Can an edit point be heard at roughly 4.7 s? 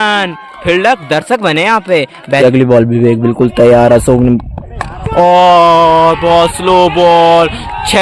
no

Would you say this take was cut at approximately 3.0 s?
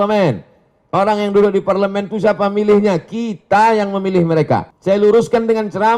no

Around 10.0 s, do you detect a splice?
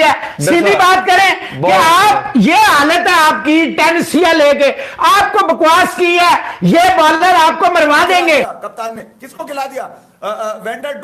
no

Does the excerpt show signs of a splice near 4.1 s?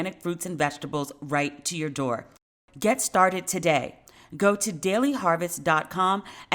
no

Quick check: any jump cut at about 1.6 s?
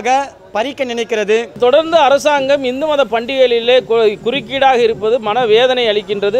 yes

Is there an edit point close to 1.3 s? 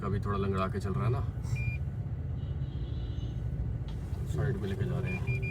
no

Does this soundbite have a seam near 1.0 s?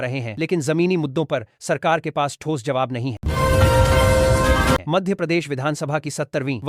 no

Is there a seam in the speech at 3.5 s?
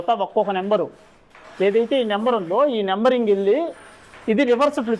no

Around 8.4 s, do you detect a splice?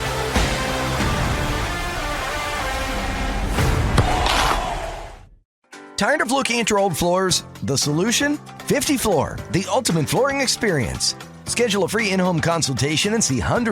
no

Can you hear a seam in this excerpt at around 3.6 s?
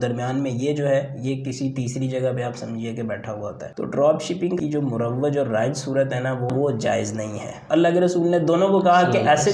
yes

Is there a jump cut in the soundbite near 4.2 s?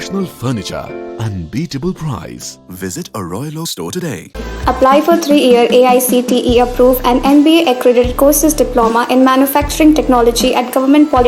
no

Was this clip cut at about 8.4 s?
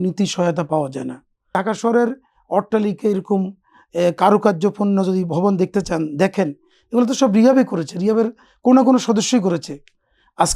no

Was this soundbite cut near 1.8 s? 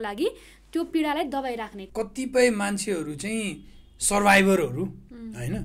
yes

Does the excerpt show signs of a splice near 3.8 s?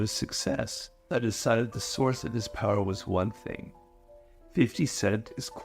no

